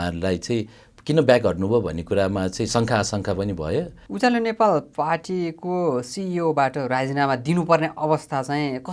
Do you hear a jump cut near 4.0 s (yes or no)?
yes